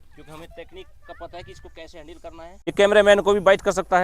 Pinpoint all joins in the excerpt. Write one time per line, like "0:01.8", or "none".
0:02.7